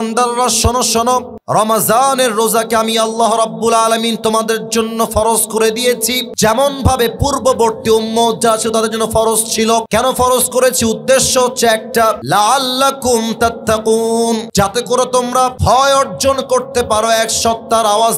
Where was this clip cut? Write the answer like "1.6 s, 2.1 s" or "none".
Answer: 1.4 s, 6.2 s, 9.9 s, 12.2 s, 14.5 s, 15.6 s